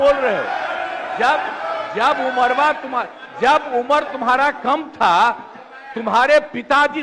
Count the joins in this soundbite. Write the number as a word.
zero